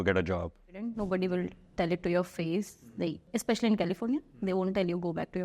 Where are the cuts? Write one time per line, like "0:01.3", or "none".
0:00.8
0:03.2

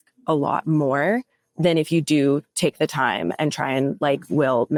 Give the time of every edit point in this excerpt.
none

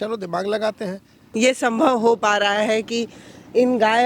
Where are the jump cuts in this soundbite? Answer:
0:01.2

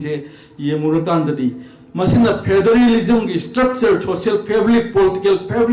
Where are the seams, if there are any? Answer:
none

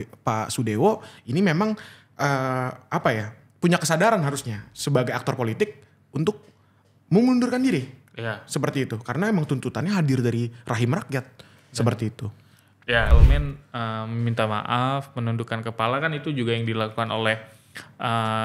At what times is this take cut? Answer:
0:13.1

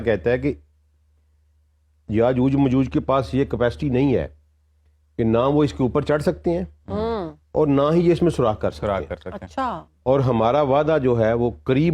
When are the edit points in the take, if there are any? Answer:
0:09.9

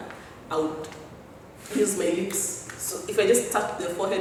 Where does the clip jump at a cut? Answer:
none

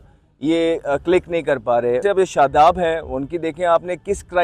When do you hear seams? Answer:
0:02.0

